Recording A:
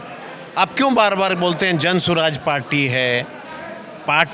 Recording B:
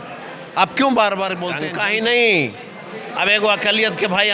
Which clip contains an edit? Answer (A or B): B